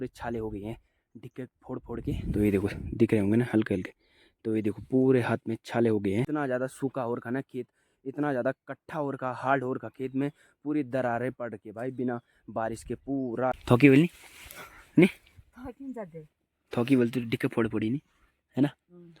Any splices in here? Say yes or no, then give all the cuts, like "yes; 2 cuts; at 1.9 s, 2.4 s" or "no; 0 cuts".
yes; 2 cuts; at 6.3 s, 13.6 s